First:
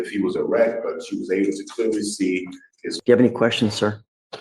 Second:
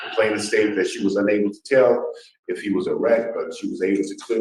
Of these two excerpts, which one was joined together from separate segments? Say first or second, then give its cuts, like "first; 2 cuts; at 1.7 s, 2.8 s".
first; 1 cut; at 2.9 s